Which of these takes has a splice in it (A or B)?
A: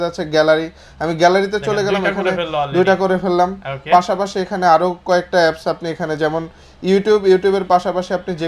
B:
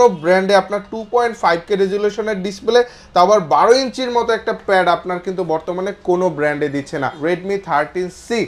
B